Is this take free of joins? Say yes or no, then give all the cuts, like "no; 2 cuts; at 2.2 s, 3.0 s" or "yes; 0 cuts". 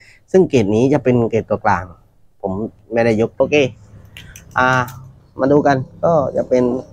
no; 1 cut; at 3.4 s